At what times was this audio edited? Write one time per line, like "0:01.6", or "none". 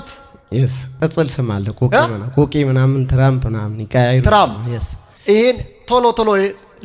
0:00.9